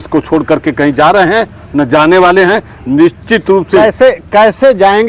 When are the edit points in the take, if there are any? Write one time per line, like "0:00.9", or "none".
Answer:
none